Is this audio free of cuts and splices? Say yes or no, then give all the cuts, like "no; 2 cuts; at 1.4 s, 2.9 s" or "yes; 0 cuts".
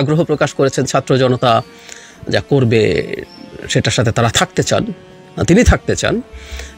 yes; 0 cuts